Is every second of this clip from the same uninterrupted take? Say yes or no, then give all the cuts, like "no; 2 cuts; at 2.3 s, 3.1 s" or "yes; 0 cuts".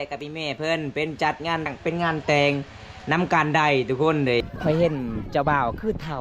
no; 2 cuts; at 1.7 s, 4.4 s